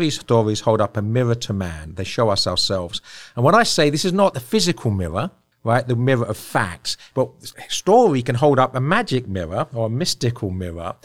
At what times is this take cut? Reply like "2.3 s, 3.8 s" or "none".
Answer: 4.4 s, 5.4 s, 7.2 s